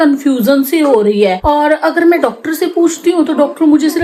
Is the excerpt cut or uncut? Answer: uncut